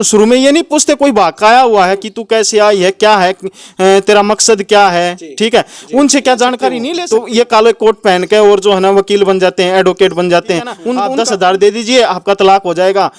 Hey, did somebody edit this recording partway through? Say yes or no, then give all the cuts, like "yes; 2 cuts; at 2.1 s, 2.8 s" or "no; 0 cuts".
yes; 2 cuts; at 6.9 s, 10.9 s